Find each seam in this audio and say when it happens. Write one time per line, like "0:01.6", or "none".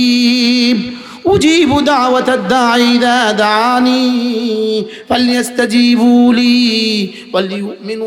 none